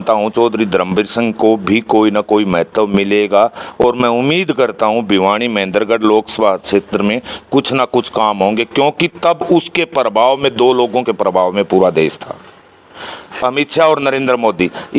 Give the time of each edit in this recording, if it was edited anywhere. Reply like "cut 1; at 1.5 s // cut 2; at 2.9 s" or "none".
none